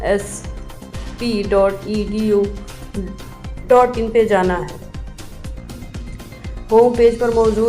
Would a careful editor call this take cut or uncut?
cut